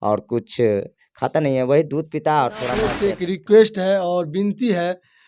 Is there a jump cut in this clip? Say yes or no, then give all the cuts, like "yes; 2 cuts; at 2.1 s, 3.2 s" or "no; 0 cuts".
yes; 1 cut; at 2.9 s